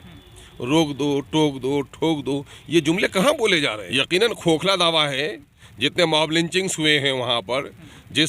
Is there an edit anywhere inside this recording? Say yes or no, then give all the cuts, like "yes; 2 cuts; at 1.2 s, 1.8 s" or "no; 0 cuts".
yes; 1 cut; at 3.8 s